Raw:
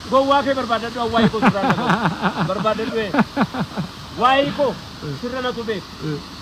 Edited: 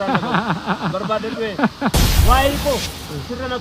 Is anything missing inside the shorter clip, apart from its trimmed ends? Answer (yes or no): yes